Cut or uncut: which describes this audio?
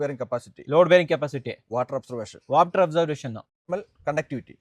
uncut